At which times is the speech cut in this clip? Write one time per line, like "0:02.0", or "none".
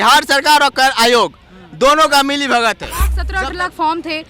0:03.2